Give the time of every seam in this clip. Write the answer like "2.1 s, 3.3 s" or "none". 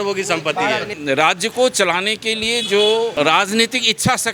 0.9 s, 3.1 s